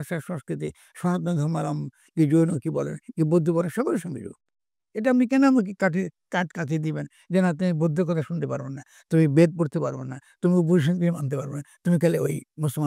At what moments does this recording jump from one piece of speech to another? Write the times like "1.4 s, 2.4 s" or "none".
none